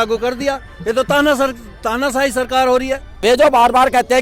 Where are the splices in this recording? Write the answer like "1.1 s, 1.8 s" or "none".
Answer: 3.0 s

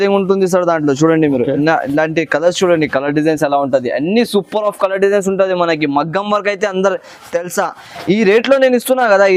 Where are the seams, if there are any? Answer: none

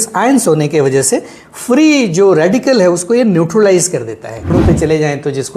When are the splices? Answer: 4.5 s

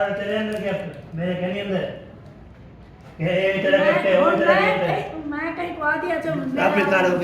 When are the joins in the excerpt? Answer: none

